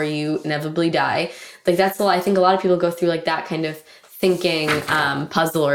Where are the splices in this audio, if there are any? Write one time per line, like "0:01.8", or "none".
none